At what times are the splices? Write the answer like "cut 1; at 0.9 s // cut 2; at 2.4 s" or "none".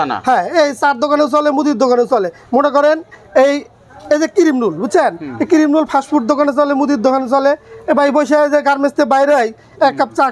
none

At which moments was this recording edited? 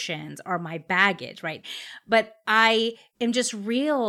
cut 1; at 1.6 s

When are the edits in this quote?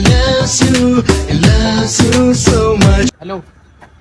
cut 1; at 3.1 s

